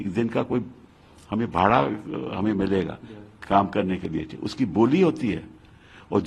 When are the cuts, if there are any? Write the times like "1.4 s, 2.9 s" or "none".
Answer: none